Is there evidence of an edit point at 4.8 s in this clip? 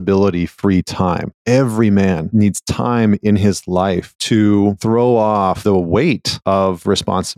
yes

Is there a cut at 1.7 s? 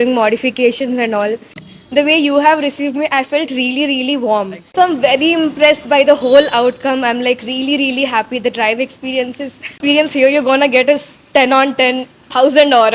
yes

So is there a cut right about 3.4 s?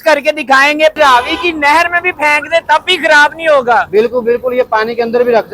no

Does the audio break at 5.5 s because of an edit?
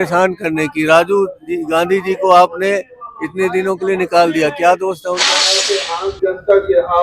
yes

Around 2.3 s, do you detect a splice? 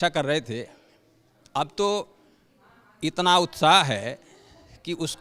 no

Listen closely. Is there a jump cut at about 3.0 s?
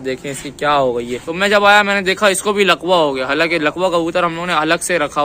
no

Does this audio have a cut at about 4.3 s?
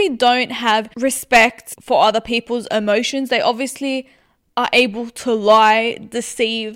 no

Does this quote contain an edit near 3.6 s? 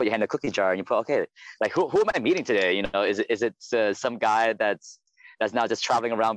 yes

